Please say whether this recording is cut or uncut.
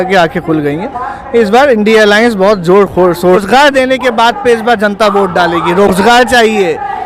cut